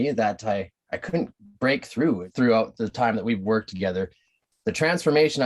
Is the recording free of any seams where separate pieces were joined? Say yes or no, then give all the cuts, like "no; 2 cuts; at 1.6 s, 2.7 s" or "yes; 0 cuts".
no; 1 cut; at 2.3 s